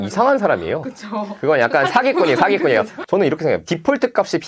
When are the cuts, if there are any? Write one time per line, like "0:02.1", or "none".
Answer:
none